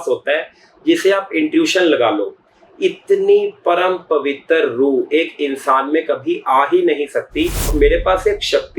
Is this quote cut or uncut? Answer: cut